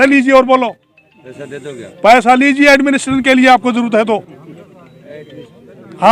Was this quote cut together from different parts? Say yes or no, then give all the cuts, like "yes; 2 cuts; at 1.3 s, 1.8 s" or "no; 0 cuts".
no; 0 cuts